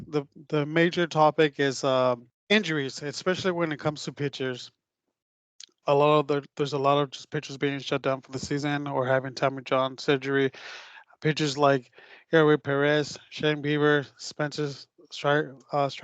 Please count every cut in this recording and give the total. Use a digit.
0